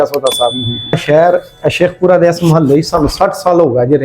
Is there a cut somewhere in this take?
yes; 1 cut; at 1.0 s

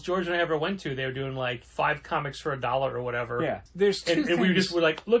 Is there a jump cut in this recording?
yes; 2 cuts; at 1.6 s, 3.7 s

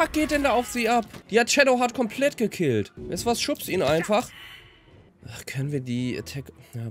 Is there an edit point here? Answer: no; 0 cuts

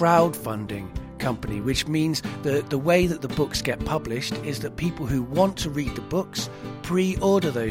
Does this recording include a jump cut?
no; 0 cuts

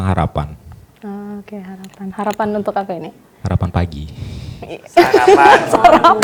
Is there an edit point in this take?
no; 0 cuts

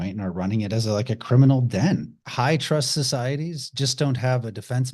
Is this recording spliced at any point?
yes; 1 cut; at 2.2 s

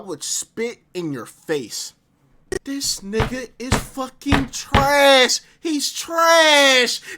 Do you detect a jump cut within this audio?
yes; 1 cut; at 2.6 s

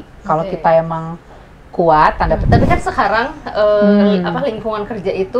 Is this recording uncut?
no; 1 cut; at 2.4 s

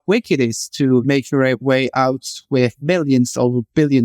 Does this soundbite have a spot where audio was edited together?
yes; 2 cuts; at 1.0 s, 2.8 s

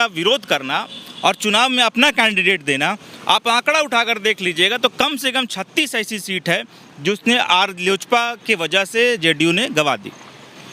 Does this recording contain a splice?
no; 0 cuts

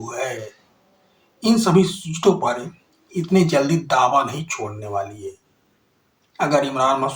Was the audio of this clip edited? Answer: no; 0 cuts

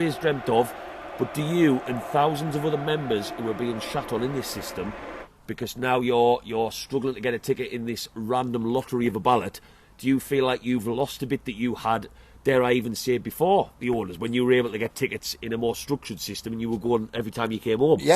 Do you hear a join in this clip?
no; 0 cuts

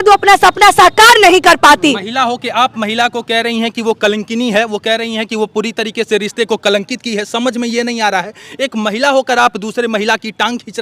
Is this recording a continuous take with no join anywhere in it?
yes; 0 cuts

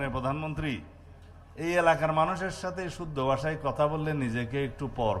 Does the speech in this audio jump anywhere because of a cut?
no; 0 cuts

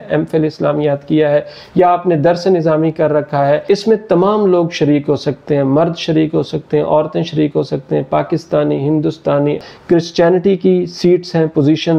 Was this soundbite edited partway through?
yes; 2 cuts; at 3.6 s, 9.6 s

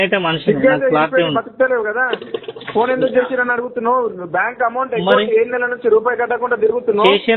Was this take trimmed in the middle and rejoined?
no; 0 cuts

